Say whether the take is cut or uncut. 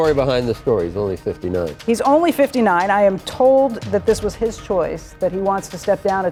uncut